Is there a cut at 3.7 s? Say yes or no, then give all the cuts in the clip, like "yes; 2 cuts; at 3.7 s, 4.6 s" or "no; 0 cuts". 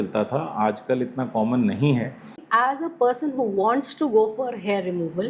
no; 1 cut; at 2.4 s